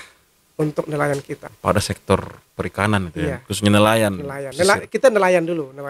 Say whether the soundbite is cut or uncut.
cut